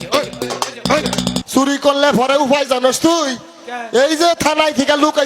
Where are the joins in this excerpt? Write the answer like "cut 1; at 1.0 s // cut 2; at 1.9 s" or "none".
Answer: cut 1; at 1.4 s